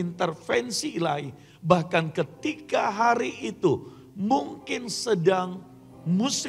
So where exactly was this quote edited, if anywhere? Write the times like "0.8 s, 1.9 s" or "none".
none

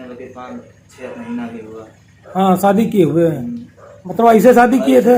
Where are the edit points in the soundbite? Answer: none

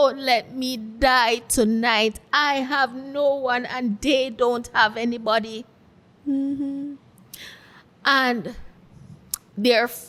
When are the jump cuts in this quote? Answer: none

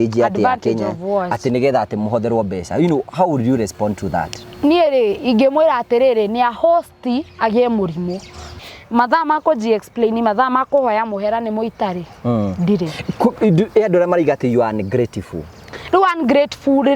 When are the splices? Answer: 8.5 s

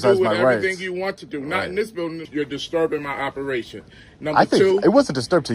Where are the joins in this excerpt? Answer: 2.2 s

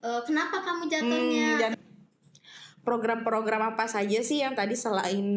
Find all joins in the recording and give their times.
1.7 s

